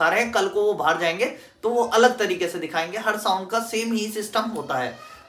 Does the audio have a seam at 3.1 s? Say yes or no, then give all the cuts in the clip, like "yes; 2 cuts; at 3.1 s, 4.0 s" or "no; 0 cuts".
no; 0 cuts